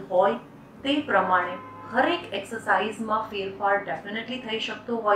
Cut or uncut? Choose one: uncut